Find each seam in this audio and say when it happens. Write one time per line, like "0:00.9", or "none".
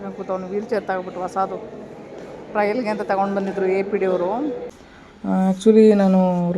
0:04.8